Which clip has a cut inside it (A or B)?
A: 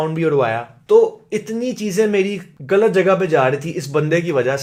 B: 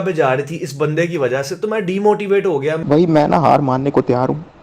B